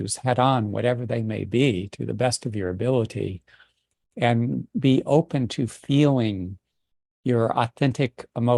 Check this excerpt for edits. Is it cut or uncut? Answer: uncut